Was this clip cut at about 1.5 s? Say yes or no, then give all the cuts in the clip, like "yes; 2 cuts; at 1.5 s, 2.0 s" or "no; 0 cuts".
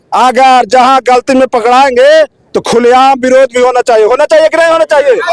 no; 0 cuts